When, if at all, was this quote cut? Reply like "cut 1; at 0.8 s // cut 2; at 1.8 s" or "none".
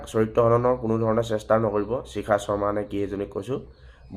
none